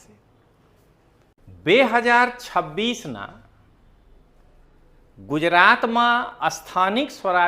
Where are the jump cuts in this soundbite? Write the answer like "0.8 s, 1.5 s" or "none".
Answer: 1.4 s